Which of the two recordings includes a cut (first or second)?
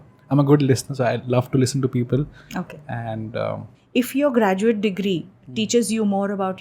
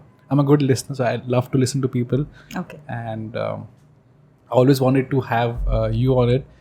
first